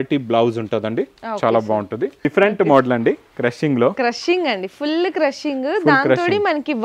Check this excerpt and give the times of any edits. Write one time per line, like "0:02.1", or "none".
0:02.2